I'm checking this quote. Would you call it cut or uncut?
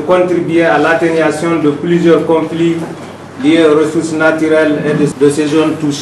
cut